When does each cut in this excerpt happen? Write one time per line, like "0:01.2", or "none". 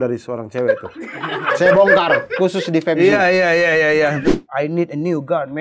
0:04.3